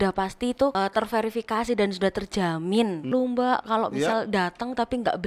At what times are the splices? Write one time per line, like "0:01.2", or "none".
0:00.7
0:03.1